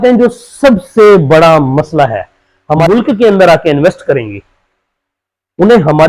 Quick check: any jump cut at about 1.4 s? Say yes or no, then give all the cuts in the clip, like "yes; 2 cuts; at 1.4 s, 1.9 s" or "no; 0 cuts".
no; 1 cut; at 2.8 s